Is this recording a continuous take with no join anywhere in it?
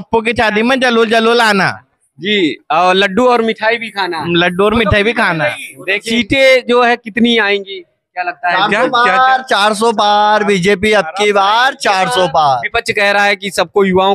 no; 1 cut; at 6.0 s

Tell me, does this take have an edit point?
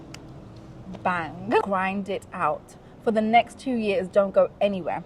yes; 1 cut; at 1.7 s

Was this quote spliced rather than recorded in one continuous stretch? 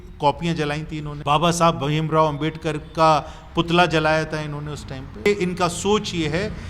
yes; 2 cuts; at 1.1 s, 5.3 s

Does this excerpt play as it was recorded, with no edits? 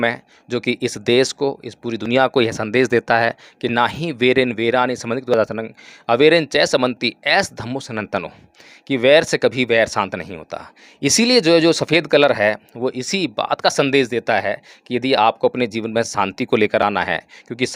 yes; 0 cuts

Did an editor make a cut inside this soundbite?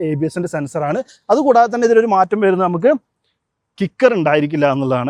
no; 0 cuts

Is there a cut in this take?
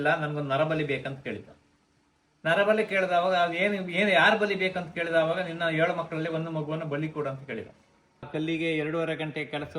yes; 1 cut; at 8.3 s

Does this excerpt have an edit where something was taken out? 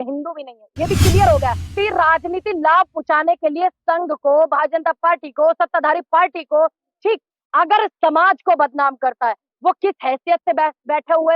yes; 1 cut; at 1.7 s

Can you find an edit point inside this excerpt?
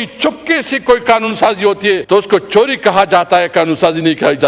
yes; 1 cut; at 2.0 s

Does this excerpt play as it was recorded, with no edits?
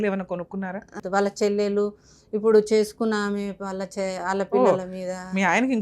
no; 1 cut; at 1.0 s

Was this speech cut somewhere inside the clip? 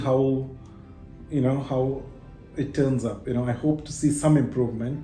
no; 0 cuts

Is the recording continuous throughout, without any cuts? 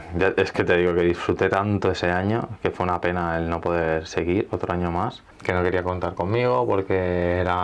no; 1 cut; at 5.3 s

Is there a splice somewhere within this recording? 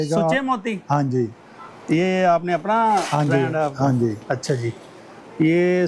no; 0 cuts

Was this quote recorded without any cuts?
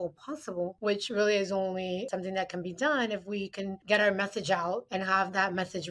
no; 2 cuts; at 2.1 s, 4.9 s

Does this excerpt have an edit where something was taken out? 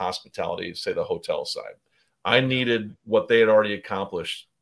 no; 0 cuts

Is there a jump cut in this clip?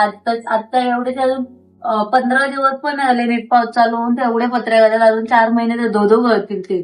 no; 0 cuts

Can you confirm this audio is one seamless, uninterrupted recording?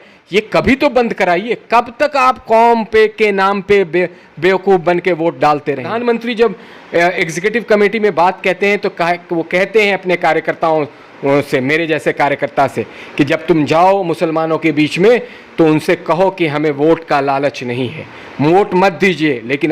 no; 1 cut; at 5.9 s

